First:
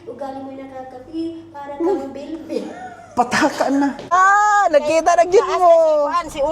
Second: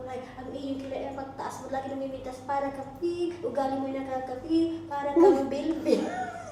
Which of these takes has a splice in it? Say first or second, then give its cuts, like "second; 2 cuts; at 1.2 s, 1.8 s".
first; 1 cut; at 4.1 s